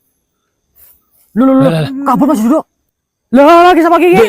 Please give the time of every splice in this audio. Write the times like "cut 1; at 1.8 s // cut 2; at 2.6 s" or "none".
cut 1; at 2.8 s

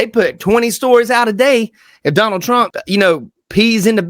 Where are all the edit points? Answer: cut 1; at 2.8 s

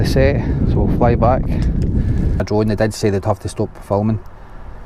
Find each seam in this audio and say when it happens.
cut 1; at 2.4 s

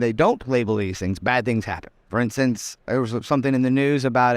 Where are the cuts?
cut 1; at 1.9 s // cut 2; at 2.8 s

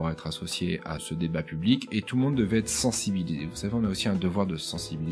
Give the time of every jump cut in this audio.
cut 1; at 1.1 s

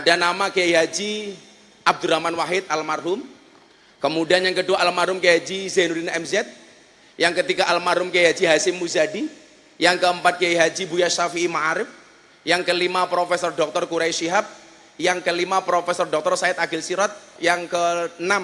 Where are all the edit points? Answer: cut 1; at 17.3 s

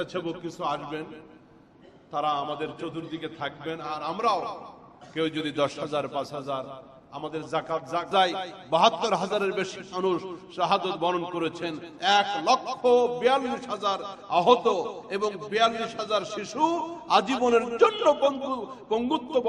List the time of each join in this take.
cut 1; at 8.1 s

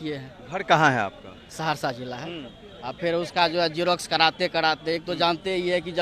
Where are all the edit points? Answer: cut 1; at 2.2 s

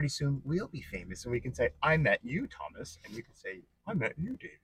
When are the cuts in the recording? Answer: none

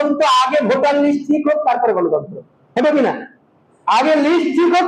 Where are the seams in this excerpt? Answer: none

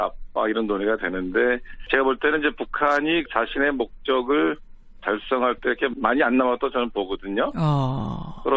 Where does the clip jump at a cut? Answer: none

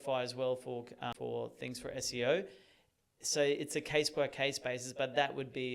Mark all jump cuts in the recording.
cut 1; at 1.1 s

